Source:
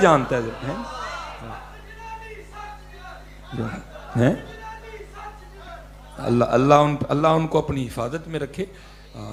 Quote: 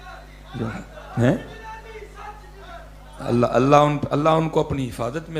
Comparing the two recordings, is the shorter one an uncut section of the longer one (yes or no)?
yes